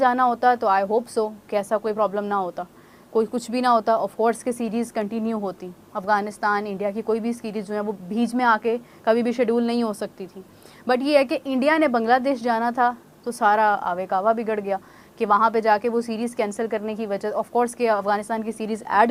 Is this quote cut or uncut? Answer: uncut